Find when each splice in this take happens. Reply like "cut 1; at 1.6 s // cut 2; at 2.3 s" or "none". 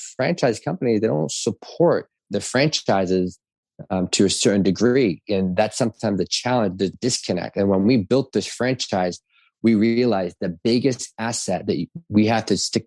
cut 1; at 2.3 s // cut 2; at 7.0 s